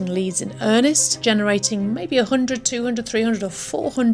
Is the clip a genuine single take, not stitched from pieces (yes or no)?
no